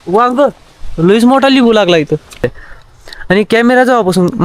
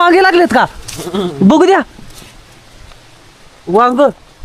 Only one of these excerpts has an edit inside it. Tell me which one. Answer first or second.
first